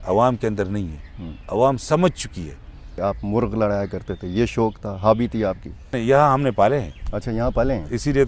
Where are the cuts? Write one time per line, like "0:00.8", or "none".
0:02.9
0:06.0